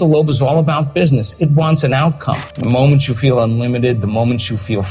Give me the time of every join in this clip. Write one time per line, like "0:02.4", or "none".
0:02.5